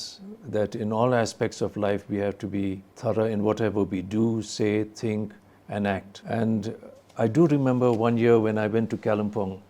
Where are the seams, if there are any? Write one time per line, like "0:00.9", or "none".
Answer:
0:02.9
0:06.1